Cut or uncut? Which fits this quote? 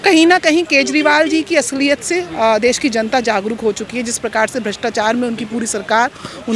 uncut